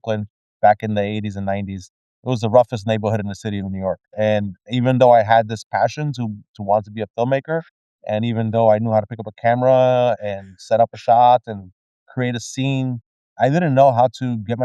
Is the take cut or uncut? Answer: uncut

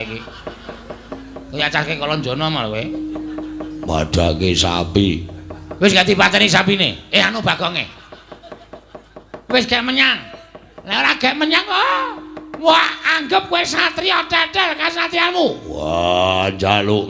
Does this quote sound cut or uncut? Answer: uncut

